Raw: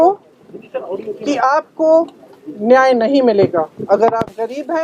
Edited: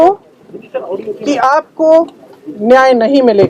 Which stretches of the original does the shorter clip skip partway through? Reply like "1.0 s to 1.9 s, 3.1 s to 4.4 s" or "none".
none